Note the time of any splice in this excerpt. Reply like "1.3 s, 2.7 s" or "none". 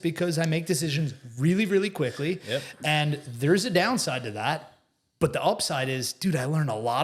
none

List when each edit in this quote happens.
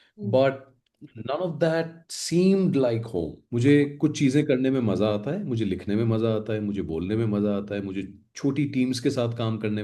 3.4 s

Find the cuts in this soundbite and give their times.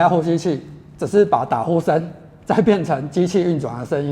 none

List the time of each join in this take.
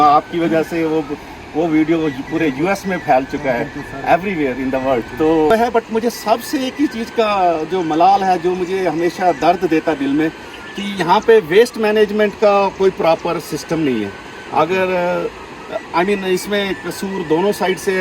5.5 s

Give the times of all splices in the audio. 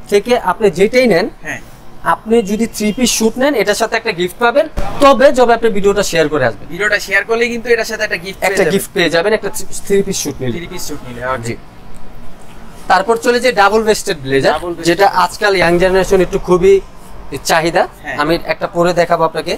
none

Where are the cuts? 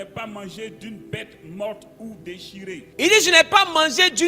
2.9 s

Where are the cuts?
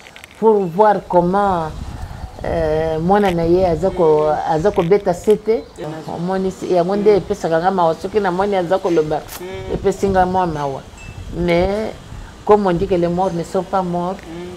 5.9 s

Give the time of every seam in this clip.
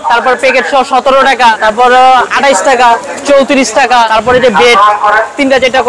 1.6 s, 3.1 s, 4.1 s

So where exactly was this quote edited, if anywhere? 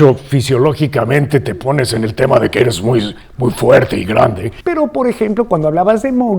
4.5 s

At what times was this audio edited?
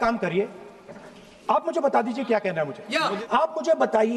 3.1 s

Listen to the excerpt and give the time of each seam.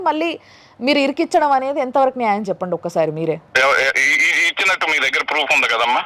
3.5 s

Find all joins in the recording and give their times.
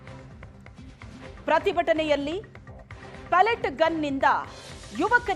1.4 s

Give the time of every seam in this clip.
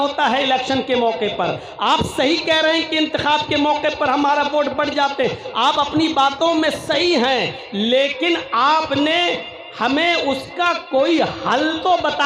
none

